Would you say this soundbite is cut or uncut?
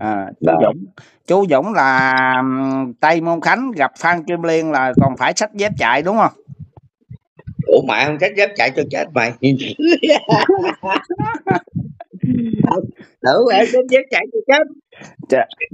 uncut